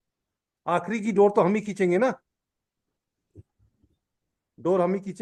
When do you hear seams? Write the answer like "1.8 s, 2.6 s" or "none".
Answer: none